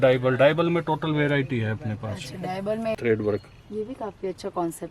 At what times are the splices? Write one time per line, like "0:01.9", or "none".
0:03.0